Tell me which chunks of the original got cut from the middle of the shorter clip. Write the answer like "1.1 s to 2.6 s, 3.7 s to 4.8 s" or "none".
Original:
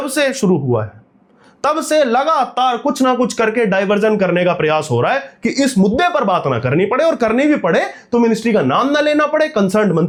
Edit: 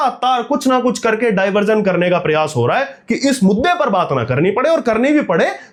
none